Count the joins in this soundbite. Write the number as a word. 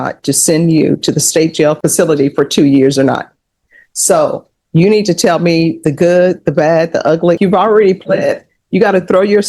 two